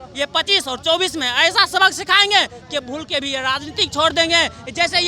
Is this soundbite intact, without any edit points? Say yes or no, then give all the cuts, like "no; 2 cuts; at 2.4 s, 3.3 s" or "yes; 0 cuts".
yes; 0 cuts